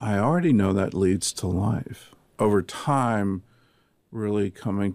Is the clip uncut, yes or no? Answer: no